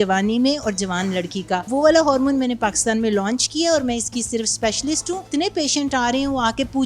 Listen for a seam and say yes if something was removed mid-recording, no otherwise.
yes